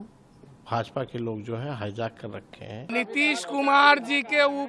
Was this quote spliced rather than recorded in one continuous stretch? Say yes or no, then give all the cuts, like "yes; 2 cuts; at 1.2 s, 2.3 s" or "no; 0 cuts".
yes; 1 cut; at 2.9 s